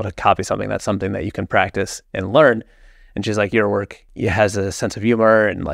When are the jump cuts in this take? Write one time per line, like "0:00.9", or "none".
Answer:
0:04.0